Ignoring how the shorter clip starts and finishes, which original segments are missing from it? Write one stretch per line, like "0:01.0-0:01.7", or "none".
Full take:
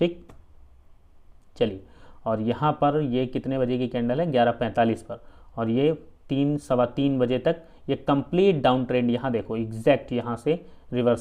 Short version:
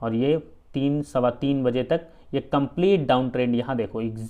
none